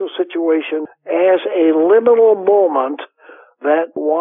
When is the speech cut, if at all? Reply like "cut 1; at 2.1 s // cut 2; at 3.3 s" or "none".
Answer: cut 1; at 0.9 s